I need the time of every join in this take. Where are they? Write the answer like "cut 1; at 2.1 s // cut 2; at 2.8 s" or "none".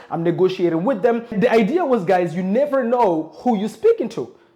cut 1; at 1.3 s